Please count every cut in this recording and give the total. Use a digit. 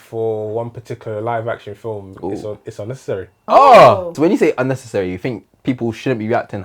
2